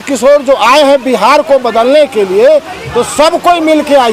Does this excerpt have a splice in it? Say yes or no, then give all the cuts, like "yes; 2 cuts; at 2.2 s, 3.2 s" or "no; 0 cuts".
no; 0 cuts